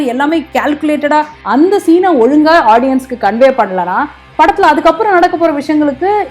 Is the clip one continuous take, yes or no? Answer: no